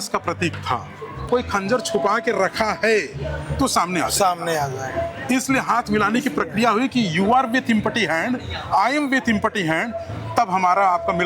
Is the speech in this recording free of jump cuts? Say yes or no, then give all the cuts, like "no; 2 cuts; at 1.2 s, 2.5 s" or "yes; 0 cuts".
no; 1 cut; at 1.3 s